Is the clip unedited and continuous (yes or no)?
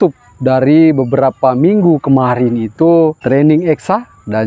no